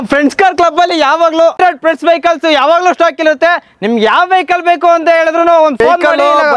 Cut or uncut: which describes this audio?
cut